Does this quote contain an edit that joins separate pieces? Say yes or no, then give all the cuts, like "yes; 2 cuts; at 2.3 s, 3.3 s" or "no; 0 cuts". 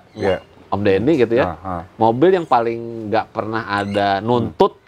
no; 0 cuts